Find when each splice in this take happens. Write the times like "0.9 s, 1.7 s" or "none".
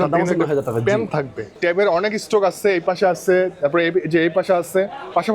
1.5 s